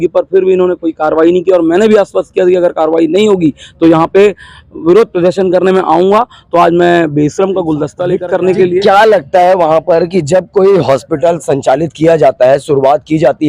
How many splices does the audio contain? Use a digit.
1